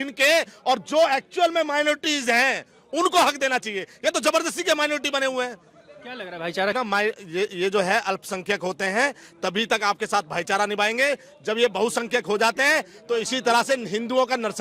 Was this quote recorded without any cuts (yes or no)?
no